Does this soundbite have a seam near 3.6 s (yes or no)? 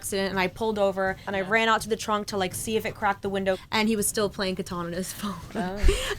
yes